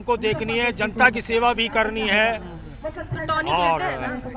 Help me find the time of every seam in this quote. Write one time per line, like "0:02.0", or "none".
none